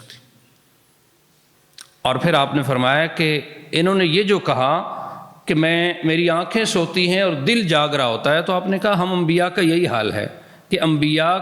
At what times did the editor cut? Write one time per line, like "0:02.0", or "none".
0:01.6